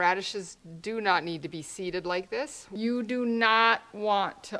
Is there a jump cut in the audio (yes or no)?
yes